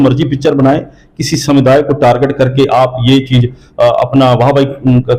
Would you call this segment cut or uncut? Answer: uncut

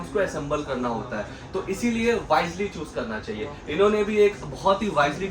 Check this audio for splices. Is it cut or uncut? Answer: uncut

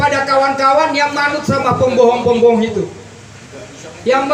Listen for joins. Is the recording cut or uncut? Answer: uncut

